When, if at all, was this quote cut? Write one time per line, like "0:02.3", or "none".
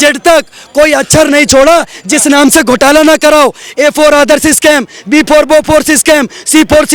none